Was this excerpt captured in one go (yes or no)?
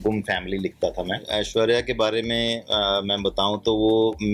no